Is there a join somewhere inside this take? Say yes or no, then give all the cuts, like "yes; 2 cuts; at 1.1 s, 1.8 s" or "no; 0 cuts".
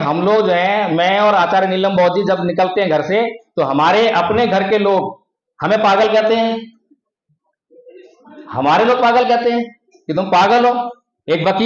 no; 0 cuts